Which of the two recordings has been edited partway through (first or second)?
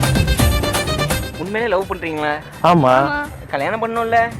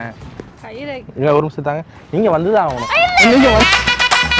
first